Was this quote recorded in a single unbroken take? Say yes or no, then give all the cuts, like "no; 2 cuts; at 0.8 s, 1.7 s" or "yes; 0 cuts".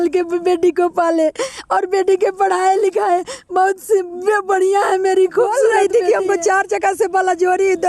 no; 1 cut; at 5.8 s